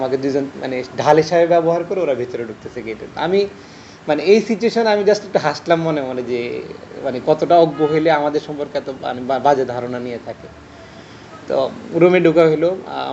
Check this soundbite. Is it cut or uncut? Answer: uncut